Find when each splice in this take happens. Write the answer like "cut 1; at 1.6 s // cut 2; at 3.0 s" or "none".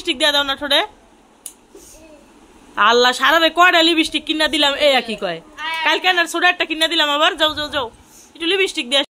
none